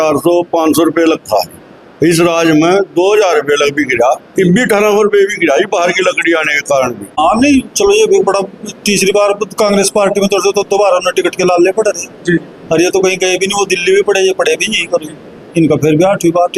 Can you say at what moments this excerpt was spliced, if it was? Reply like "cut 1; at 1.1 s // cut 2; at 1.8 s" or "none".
cut 1; at 7.0 s